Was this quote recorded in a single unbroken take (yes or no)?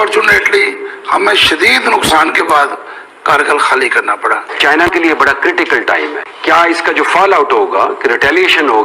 no